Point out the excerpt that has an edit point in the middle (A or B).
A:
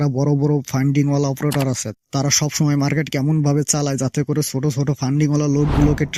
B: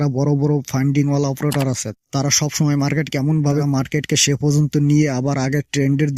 B